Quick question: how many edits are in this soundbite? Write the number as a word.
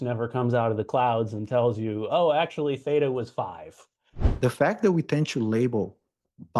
one